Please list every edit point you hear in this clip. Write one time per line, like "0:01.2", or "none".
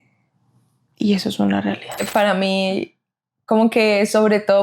0:02.3